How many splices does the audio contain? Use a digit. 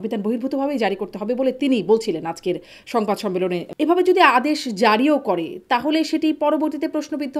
1